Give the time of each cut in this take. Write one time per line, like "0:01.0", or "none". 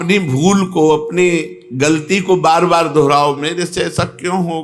none